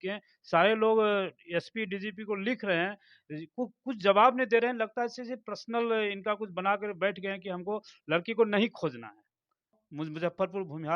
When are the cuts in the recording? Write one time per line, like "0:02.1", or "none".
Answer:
0:09.8